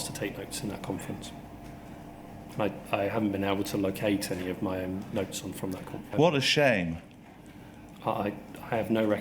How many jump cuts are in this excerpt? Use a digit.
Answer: 2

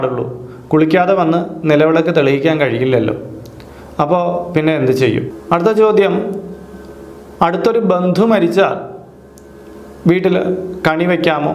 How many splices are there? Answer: 1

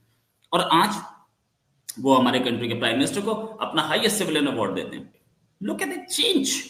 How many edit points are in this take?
1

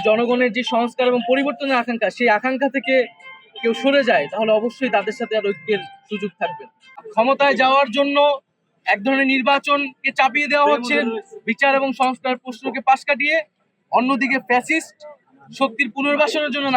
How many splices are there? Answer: 1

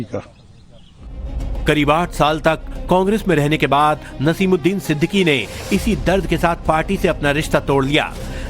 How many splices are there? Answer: 1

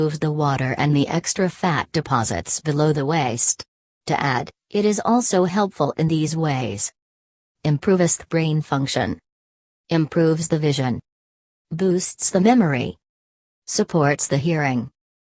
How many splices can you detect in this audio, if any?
1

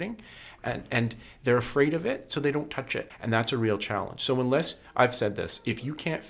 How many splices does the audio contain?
1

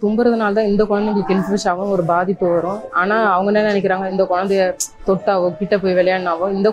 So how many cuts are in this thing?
2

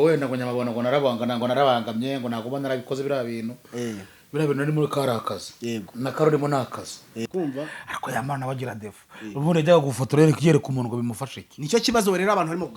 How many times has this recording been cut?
1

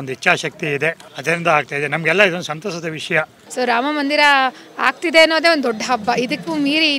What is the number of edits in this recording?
2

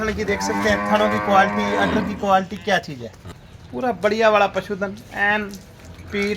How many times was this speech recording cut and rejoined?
0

